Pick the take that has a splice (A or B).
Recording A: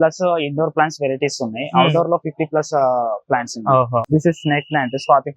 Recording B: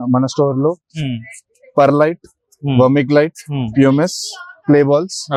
A